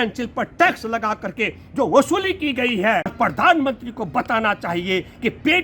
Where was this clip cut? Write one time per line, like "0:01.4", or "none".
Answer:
0:03.1